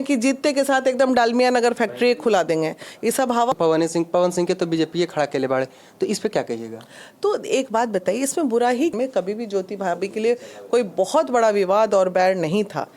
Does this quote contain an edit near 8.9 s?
yes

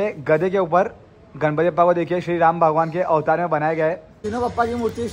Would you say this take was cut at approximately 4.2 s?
yes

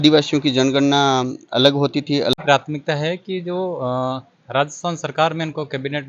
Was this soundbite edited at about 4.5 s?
no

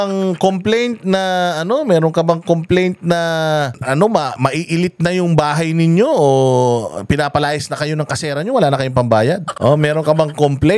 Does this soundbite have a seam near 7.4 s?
no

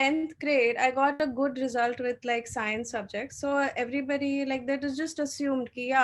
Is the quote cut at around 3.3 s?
no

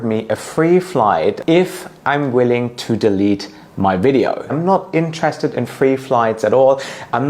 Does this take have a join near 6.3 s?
no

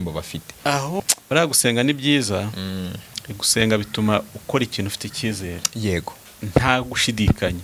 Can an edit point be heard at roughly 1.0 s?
yes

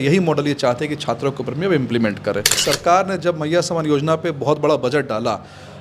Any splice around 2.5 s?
yes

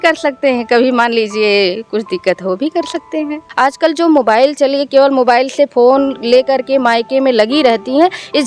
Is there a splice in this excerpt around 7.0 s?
no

